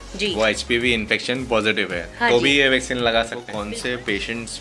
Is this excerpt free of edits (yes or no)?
no